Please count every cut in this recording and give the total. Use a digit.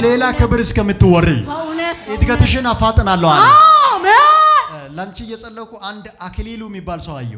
1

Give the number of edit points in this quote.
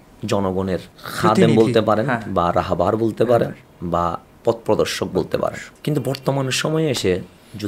2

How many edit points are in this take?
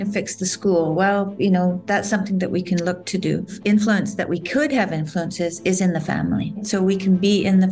2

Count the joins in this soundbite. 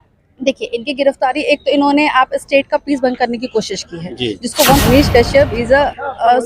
1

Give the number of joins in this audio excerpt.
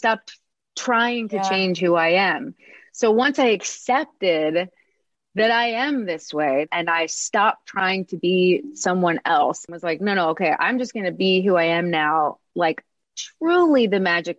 2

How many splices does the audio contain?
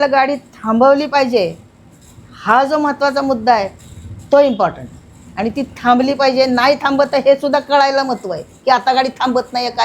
0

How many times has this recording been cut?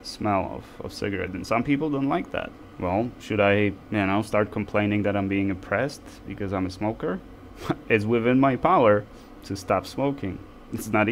2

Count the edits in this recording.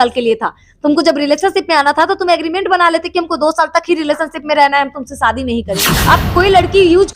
1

